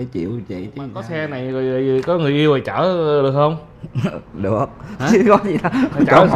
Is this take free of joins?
no; 1 cut; at 1.1 s

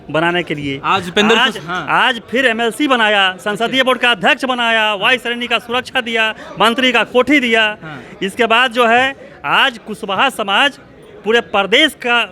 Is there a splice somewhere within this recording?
no; 0 cuts

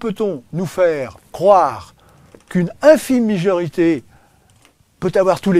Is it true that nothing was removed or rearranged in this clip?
yes; 0 cuts

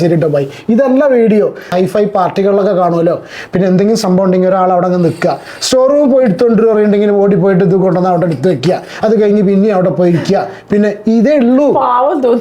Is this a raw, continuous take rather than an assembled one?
no; 1 cut; at 1.7 s

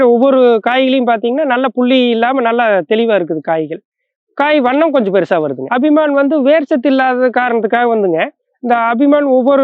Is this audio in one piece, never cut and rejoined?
no; 1 cut; at 5.6 s

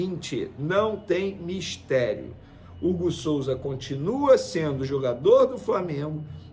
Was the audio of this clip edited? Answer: no; 0 cuts

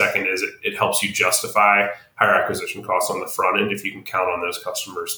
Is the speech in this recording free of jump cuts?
yes; 0 cuts

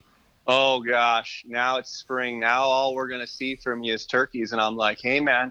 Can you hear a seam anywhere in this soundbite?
no; 0 cuts

